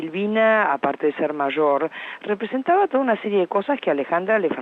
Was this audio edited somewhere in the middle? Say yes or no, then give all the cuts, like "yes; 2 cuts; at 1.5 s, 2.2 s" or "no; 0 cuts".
no; 0 cuts